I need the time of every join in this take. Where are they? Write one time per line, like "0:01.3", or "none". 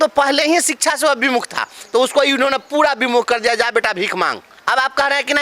0:04.5